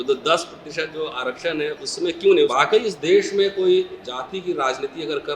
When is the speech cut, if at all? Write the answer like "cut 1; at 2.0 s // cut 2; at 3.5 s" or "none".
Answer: cut 1; at 2.5 s